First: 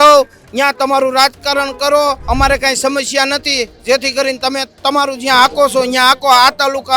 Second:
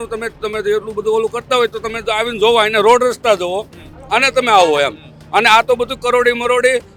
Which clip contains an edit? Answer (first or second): first